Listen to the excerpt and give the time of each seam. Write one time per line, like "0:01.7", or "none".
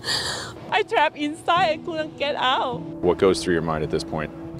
0:02.9